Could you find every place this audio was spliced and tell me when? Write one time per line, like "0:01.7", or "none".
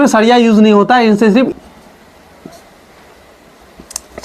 0:01.5